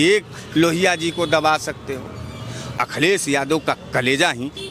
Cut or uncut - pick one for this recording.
cut